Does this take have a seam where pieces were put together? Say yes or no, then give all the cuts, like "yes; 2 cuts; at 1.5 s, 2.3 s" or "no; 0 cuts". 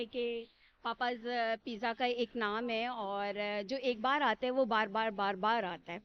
no; 0 cuts